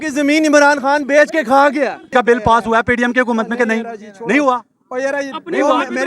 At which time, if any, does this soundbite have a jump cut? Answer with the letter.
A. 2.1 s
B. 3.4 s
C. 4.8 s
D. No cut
A